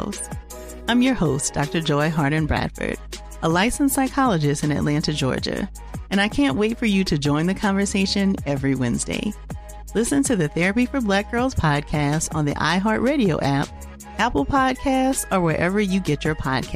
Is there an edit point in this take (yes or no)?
no